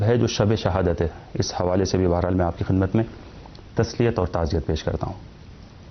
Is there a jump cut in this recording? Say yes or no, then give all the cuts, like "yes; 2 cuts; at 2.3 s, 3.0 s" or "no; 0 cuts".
no; 0 cuts